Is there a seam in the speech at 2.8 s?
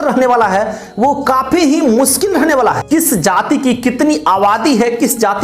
yes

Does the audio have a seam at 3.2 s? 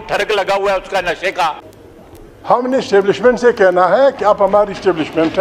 no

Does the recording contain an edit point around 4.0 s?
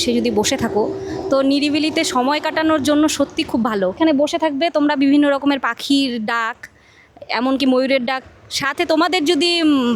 yes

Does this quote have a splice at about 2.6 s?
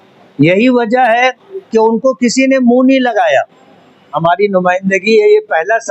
no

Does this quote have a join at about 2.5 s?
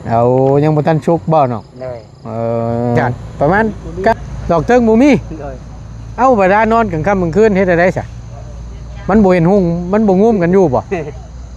no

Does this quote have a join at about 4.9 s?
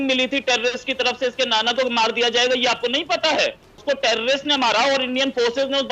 no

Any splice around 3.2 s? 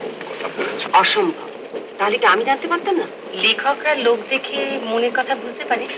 yes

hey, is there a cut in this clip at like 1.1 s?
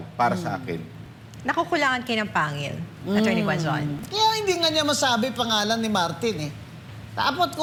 no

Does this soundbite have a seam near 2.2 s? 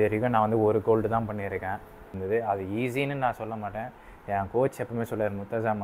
yes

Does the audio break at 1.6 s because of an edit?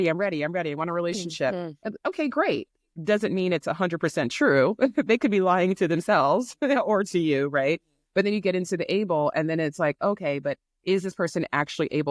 no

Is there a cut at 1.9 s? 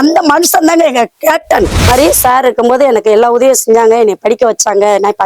yes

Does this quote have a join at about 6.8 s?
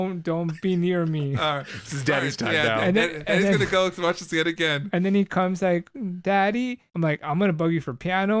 yes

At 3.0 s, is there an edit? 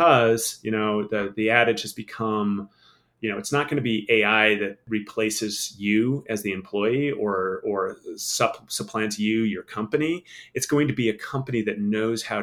no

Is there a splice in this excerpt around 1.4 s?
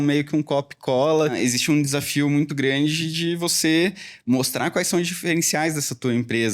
yes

